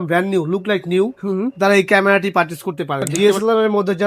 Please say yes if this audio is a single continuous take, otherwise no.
no